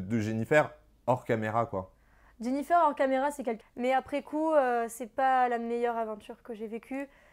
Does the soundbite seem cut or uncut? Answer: cut